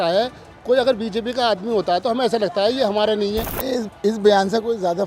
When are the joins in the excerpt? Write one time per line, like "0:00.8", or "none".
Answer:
0:03.5